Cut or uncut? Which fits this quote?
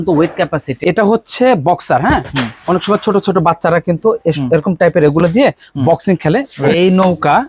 cut